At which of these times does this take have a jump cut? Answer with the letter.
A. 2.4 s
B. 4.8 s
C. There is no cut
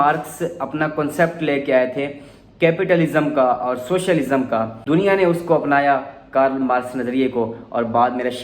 B